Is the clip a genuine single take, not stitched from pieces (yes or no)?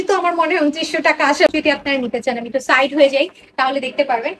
no